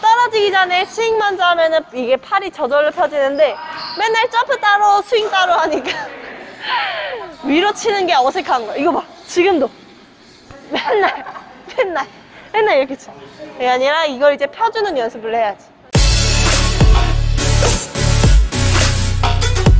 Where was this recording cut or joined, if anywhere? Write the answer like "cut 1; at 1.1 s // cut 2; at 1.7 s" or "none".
cut 1; at 15.7 s